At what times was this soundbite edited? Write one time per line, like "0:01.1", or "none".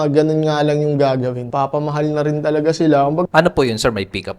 0:01.4
0:03.2

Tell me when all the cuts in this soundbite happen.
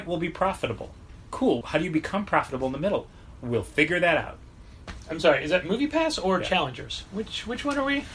0:01.6

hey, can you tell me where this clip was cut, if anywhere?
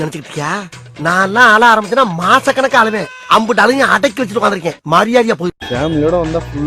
0:05.6

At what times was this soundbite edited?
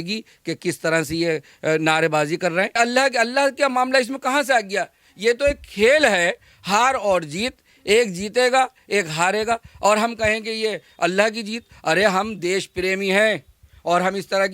0:02.8

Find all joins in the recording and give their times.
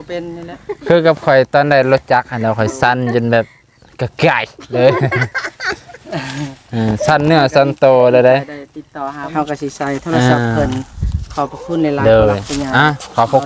0:09.5

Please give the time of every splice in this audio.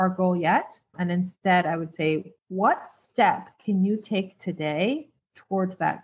none

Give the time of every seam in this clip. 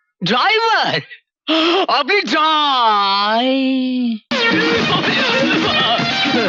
0:04.3

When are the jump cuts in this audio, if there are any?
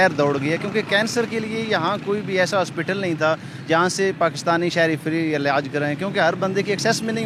none

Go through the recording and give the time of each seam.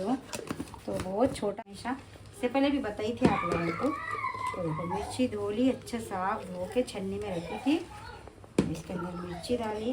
0:01.5

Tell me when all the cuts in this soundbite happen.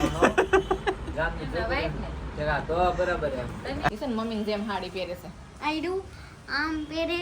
0:03.9

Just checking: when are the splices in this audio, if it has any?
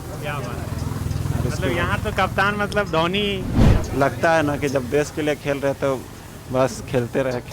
0:03.6

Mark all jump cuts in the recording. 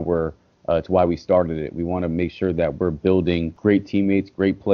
0:03.5

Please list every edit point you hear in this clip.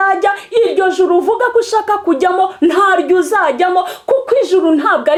none

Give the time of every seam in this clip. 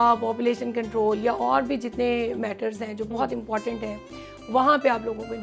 none

